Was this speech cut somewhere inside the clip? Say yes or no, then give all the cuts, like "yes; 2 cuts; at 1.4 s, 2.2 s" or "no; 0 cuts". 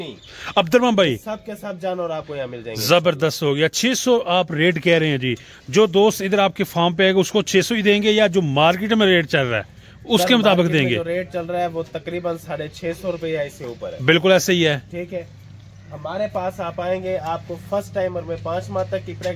no; 0 cuts